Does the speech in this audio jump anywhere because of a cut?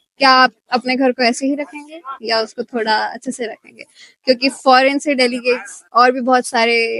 no; 0 cuts

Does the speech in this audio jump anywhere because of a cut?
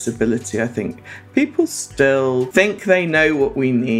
yes; 1 cut; at 2.5 s

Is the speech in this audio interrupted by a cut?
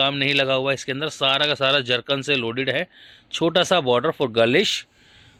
no; 0 cuts

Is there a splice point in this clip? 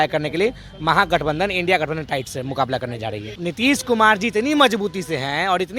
yes; 1 cut; at 3.3 s

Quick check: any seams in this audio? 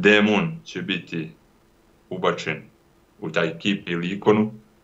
no; 0 cuts

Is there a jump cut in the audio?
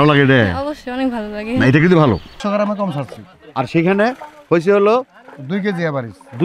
yes; 1 cut; at 2.4 s

